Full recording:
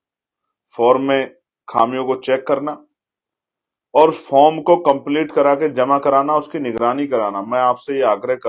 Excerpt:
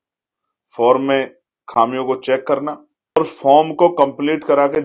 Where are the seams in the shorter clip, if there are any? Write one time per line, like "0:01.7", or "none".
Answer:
0:03.2

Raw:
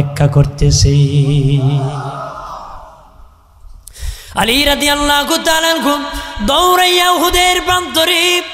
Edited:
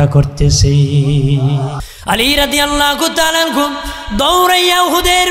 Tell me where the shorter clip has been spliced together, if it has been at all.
0:01.8

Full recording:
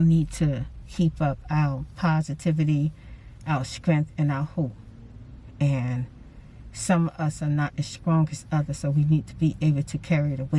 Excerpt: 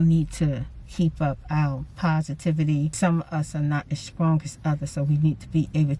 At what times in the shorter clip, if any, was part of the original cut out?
0:02.9

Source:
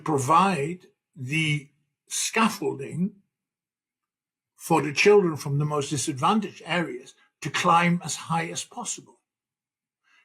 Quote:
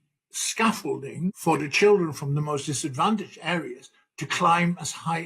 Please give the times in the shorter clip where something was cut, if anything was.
0:01.4

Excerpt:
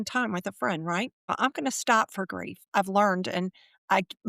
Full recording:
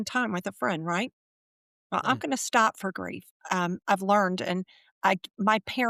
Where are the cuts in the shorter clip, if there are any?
0:01.2
0:02.6

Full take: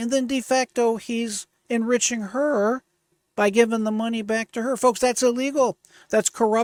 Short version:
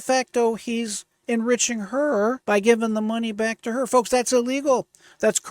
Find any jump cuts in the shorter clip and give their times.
0:02.4

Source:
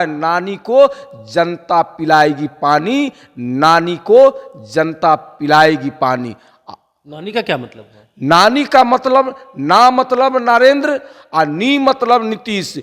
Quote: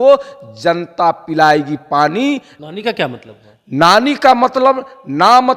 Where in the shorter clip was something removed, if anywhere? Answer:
0:02.6

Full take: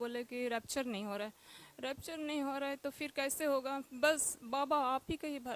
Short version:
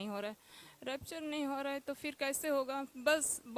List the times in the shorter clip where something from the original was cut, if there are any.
none

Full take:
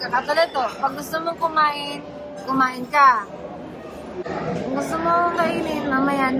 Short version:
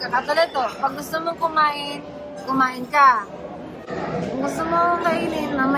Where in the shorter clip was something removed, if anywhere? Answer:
0:03.9

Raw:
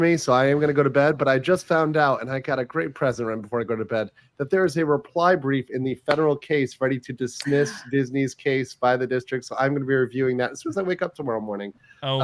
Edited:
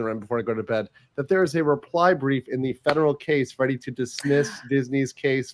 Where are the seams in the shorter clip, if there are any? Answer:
none

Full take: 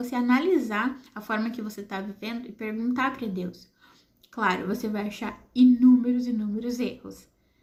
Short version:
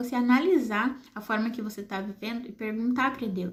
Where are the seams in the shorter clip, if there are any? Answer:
none

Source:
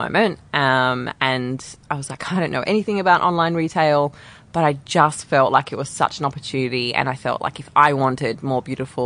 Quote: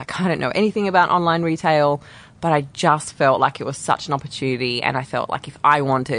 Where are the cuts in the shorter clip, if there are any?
none

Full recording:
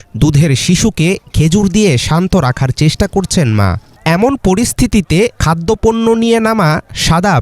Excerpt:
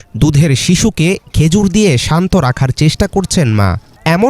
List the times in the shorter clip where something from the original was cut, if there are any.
none

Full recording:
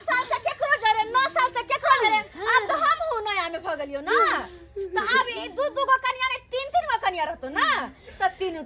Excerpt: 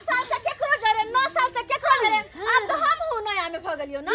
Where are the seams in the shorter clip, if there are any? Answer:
none

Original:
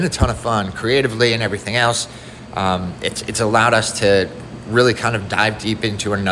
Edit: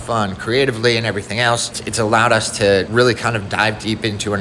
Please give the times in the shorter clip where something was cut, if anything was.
0:01.8
0:02.9

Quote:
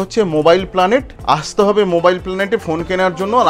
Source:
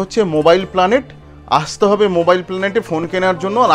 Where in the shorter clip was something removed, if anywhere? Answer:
0:01.1

